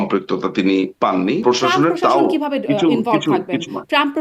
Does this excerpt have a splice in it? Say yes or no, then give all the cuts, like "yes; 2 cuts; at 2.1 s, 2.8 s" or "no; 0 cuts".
yes; 1 cut; at 1.4 s